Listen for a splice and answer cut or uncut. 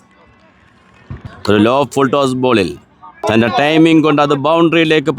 cut